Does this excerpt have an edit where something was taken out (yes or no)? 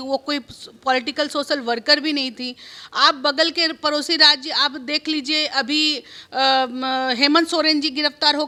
no